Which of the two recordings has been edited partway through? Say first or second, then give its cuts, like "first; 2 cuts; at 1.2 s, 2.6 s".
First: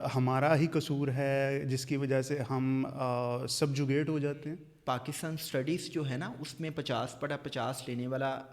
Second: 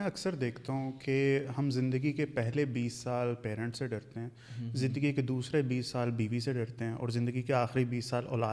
first; 1 cut; at 4.7 s